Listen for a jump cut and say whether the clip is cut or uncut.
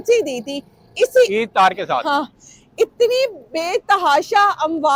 uncut